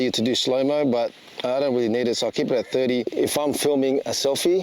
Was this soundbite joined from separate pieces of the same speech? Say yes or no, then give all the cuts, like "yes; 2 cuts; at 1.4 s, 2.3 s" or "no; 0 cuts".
yes; 1 cut; at 3.1 s